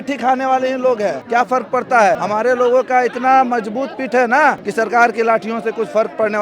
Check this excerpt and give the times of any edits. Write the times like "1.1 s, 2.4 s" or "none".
1.2 s, 2.2 s, 4.6 s